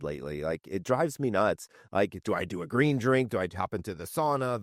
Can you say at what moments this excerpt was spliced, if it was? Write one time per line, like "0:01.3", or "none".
none

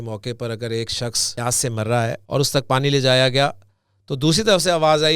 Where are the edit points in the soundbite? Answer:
0:01.3
0:02.2

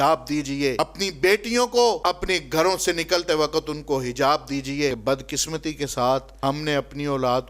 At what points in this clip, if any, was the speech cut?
0:00.8
0:02.0
0:05.0
0:06.3

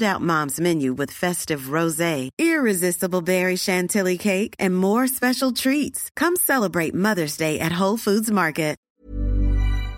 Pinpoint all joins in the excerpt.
0:08.9

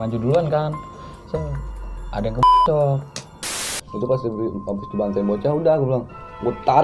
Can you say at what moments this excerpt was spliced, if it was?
0:03.6

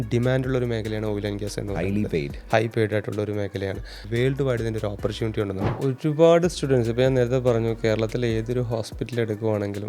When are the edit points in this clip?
0:04.0
0:05.8

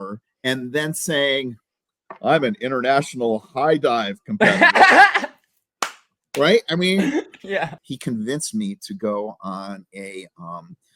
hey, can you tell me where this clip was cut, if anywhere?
0:07.8

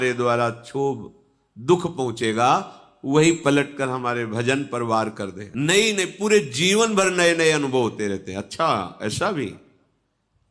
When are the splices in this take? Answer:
0:05.4

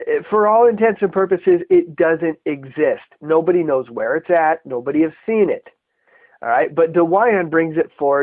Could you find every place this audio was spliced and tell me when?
0:02.6

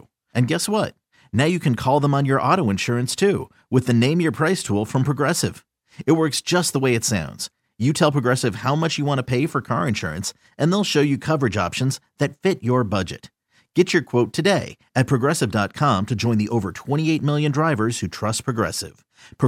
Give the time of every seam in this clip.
none

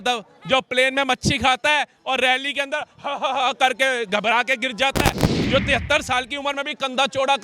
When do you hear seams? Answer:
0:05.4

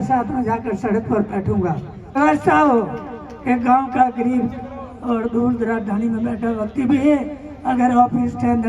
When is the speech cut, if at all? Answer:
0:02.2

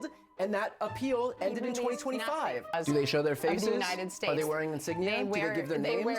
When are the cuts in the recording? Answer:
0:02.7

